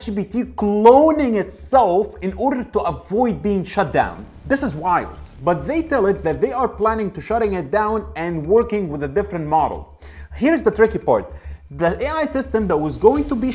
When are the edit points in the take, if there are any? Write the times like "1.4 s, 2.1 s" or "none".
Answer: 5.3 s